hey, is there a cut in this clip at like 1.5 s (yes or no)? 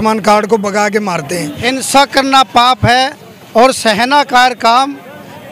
yes